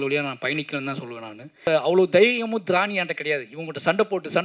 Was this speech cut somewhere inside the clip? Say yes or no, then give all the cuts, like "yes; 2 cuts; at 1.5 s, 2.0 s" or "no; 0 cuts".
yes; 1 cut; at 1.6 s